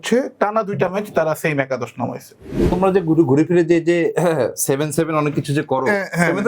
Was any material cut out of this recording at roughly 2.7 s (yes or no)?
yes